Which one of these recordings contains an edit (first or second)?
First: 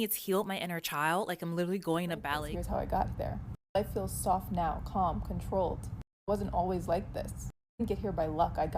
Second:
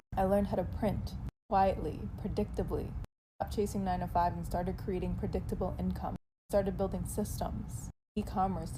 first